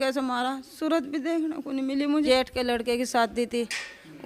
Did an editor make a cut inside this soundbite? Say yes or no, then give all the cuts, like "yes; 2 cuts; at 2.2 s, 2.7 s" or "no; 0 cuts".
yes; 1 cut; at 2.3 s